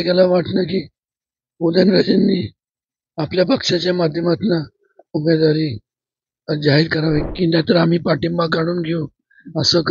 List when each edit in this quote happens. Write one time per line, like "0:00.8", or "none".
0:07.3